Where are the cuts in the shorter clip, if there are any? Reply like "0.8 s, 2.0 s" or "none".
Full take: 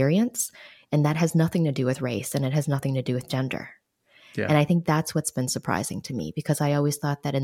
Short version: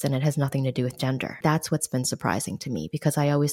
1.4 s